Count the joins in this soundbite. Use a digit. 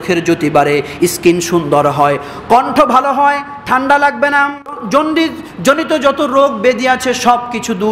1